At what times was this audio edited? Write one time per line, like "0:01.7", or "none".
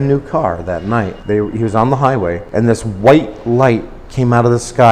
0:01.2
0:02.4